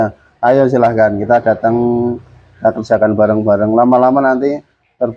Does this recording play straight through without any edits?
yes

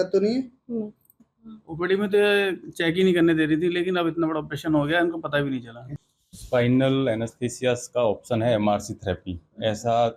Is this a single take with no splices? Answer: no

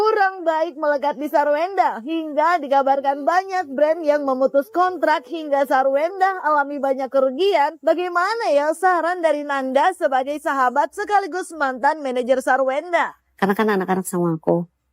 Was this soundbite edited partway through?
no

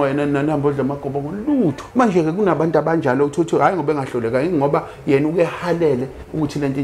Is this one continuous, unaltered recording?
no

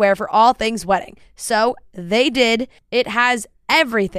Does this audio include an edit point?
no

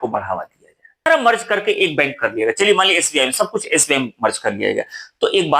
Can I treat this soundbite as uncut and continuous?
no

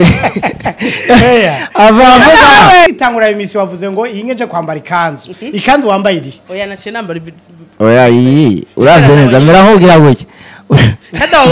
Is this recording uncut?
no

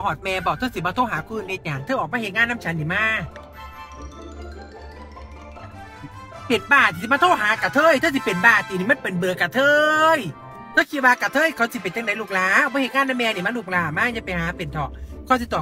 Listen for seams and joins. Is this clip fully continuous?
no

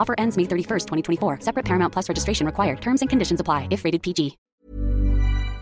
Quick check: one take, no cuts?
no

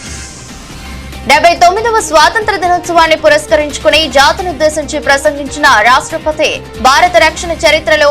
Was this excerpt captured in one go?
no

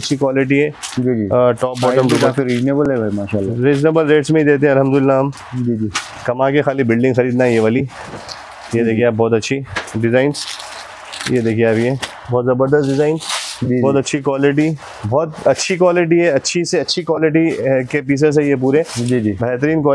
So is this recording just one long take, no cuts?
yes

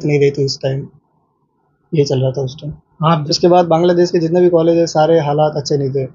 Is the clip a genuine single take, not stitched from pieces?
no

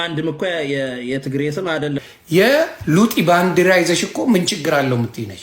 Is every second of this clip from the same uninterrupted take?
no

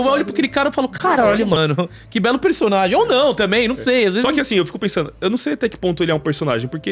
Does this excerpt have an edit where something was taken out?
no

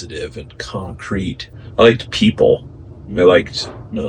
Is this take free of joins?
no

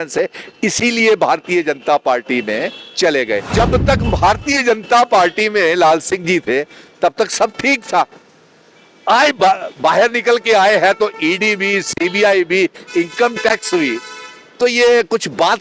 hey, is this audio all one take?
no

